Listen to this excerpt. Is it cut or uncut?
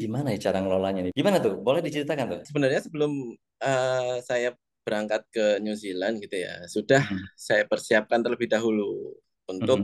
cut